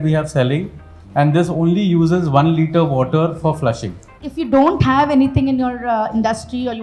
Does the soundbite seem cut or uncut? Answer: cut